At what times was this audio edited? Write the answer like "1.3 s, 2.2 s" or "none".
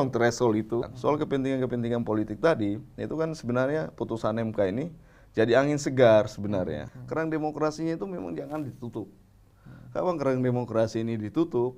0.9 s, 6.9 s